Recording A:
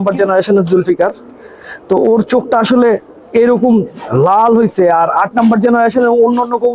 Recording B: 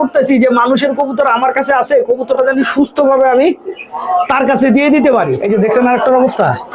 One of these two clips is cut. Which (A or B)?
B